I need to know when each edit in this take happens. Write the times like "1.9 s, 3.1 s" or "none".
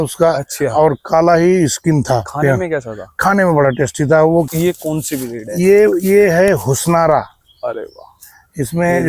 4.5 s